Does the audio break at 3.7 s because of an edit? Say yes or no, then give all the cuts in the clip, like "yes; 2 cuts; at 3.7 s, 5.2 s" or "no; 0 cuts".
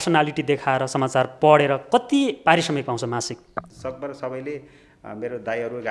yes; 1 cut; at 3.7 s